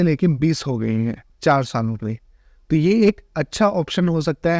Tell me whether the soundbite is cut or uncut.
cut